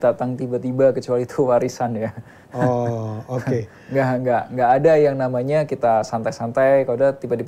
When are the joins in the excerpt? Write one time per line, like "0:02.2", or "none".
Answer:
none